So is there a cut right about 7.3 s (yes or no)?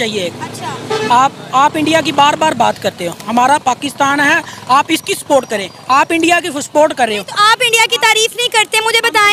no